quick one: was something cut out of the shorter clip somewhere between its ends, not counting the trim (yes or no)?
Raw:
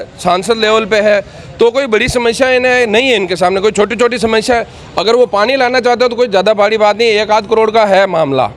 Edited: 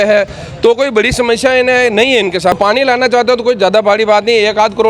yes